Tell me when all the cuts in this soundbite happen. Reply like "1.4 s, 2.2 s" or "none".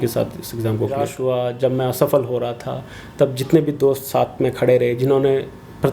1.1 s